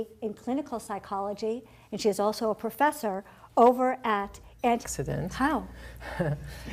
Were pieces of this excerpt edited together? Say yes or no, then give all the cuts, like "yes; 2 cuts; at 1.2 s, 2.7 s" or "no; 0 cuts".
no; 0 cuts